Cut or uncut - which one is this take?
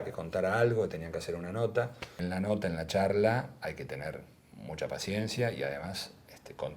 cut